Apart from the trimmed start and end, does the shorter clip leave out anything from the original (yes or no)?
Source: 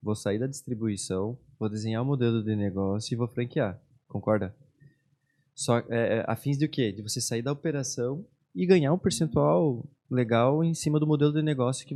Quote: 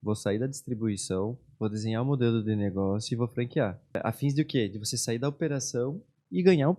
yes